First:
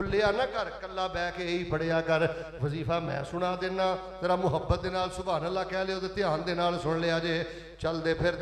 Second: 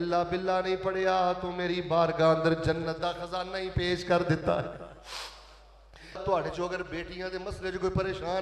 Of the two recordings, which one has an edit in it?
second; 1 cut; at 6.2 s

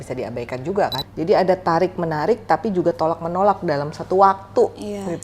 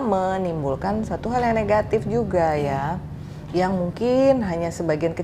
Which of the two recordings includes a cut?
first; 1 cut; at 1.0 s

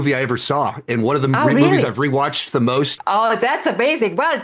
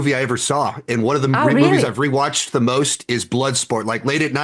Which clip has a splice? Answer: first; 1 cut; at 3.0 s

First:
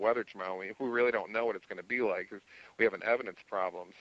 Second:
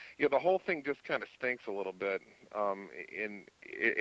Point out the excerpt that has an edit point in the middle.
second; 1 cut; at 2.0 s

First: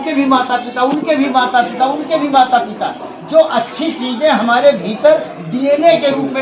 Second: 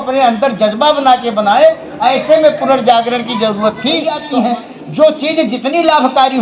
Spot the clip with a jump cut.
second; 1 cut; at 4.1 s

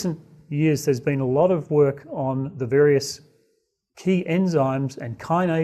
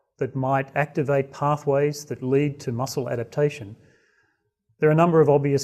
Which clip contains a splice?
second; 1 cut; at 4.6 s

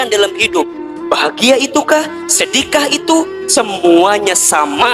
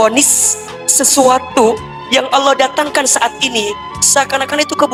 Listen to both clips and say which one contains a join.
first; 1 cut; at 3.4 s

